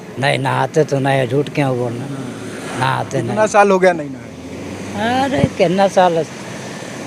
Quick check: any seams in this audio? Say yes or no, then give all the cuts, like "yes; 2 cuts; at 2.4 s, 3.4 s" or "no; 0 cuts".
no; 0 cuts